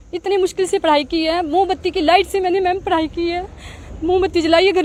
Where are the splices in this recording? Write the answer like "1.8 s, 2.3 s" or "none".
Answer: none

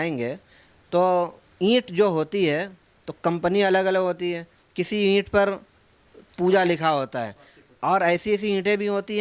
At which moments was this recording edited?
none

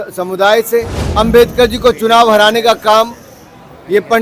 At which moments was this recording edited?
1.0 s

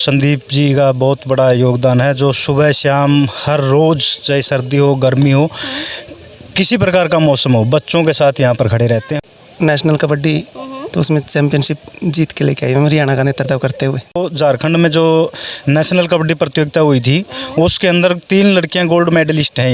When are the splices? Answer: 9.2 s, 14.3 s

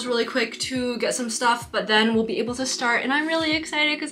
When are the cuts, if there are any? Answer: none

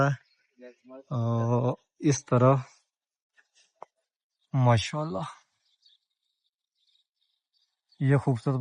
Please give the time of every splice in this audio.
none

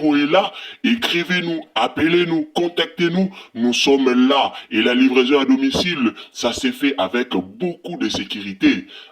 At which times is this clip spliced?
none

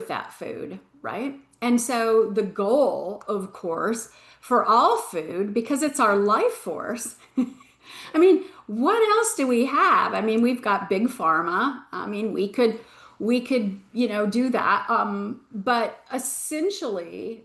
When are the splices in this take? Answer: none

